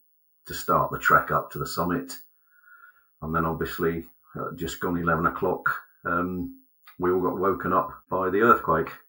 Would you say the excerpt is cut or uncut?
cut